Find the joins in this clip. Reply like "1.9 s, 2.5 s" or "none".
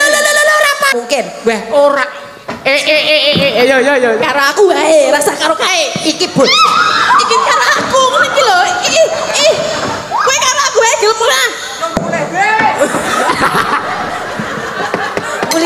0.9 s